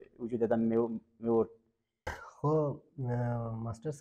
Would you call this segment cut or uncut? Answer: cut